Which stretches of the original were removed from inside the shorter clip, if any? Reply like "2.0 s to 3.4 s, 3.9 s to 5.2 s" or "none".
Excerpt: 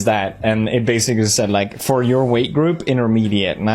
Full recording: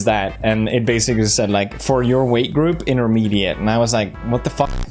none